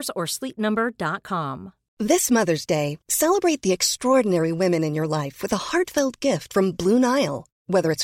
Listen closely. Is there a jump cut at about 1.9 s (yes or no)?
yes